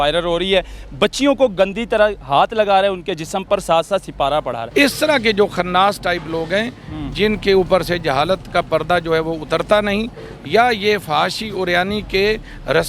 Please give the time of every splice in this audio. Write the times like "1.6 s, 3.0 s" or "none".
4.6 s